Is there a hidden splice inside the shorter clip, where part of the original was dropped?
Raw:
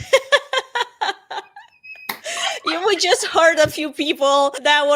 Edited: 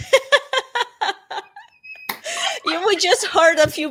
no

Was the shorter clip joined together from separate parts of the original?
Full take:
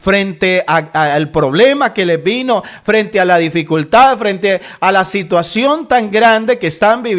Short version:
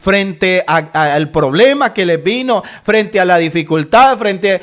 no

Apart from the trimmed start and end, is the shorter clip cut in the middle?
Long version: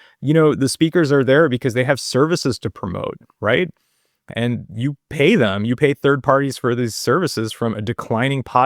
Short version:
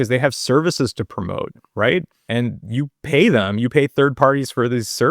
yes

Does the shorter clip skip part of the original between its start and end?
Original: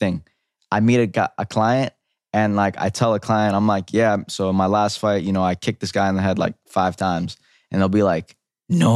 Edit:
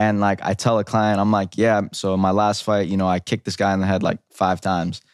no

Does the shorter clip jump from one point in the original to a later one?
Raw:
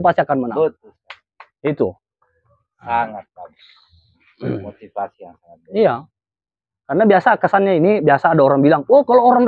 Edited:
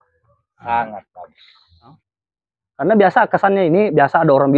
yes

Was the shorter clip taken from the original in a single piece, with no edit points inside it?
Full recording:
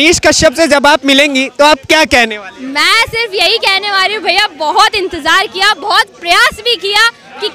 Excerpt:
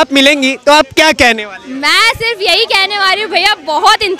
yes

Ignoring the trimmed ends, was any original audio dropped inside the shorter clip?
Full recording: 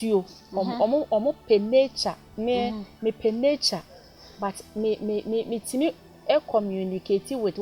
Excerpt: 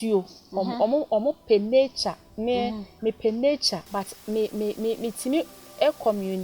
yes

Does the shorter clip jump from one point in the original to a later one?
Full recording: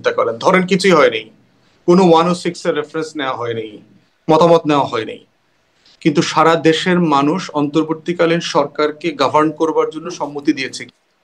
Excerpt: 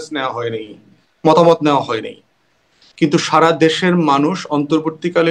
no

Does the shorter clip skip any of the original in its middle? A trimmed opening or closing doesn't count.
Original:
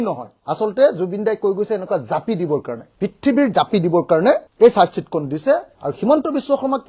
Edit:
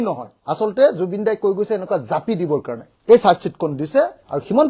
yes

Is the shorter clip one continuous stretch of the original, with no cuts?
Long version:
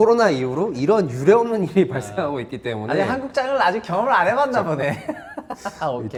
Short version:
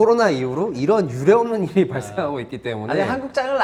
yes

